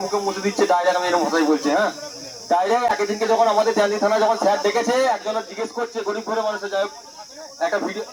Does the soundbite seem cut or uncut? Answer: uncut